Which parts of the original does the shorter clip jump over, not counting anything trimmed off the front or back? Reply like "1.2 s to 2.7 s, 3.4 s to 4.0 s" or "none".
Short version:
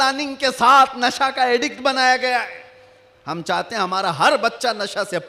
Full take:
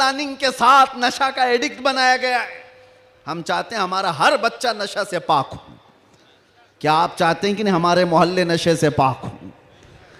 none